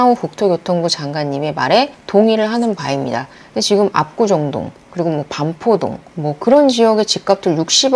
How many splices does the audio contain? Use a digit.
1